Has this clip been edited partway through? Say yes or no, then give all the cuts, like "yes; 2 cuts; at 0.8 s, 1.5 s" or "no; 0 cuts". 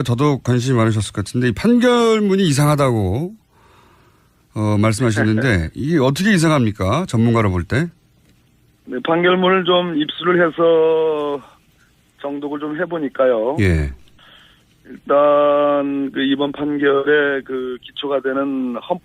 no; 0 cuts